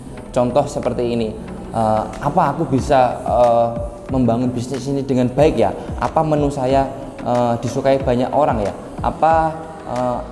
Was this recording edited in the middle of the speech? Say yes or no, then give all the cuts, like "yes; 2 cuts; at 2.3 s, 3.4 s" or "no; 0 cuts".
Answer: no; 0 cuts